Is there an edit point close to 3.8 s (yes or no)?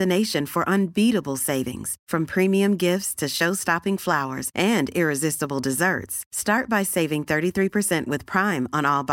no